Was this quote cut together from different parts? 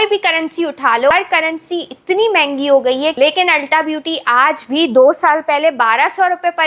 yes; 2 cuts; at 1.1 s, 3.1 s

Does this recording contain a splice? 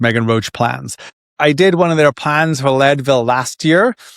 yes; 1 cut; at 1.2 s

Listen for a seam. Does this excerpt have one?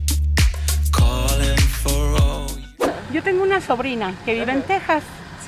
yes; 1 cut; at 2.7 s

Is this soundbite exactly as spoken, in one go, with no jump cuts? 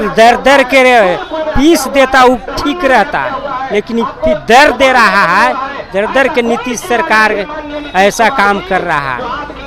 yes; 0 cuts

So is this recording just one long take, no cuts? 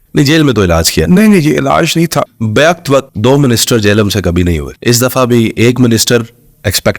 no; 3 cuts; at 2.3 s, 3.1 s, 4.7 s

